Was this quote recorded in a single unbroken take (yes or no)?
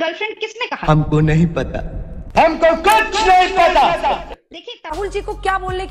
no